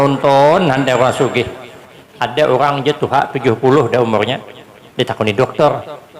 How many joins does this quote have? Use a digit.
1